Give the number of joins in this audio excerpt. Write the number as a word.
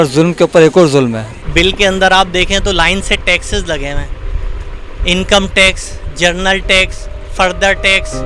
one